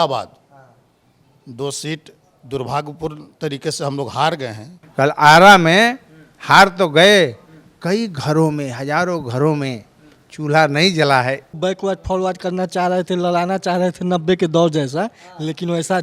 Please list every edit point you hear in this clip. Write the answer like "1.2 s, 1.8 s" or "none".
4.8 s, 11.5 s